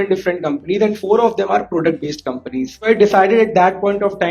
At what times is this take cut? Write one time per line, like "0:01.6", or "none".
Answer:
0:02.7